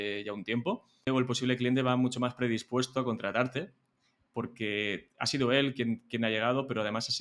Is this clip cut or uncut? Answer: cut